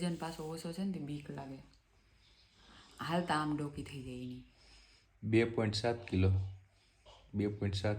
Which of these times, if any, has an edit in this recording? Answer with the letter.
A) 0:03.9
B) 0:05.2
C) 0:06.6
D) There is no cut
D